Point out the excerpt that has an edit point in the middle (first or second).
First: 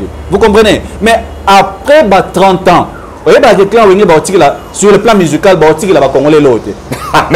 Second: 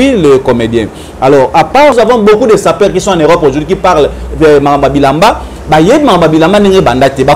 second